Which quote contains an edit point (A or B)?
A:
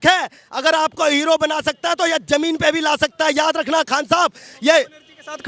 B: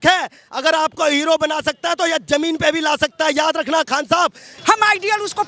B